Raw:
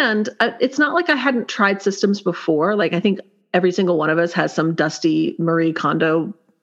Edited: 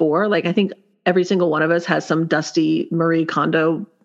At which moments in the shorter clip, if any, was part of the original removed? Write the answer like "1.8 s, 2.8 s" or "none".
none

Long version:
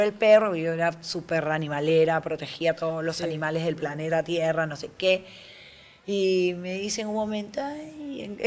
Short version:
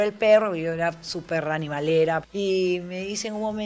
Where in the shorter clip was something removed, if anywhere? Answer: 2.3 s

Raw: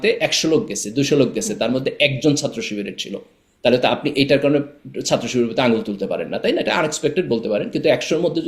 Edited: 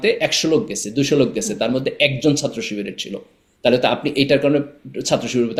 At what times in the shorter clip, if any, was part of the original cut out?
none

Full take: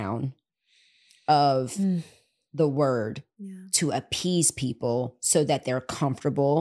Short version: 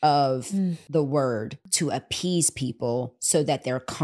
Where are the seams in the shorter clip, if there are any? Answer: 0.8 s, 1.6 s

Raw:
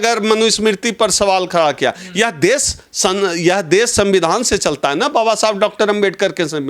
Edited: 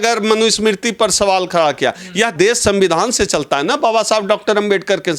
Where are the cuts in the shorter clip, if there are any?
2.3 s

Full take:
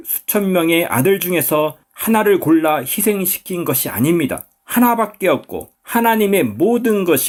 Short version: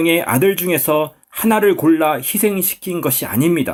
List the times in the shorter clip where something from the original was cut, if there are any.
none

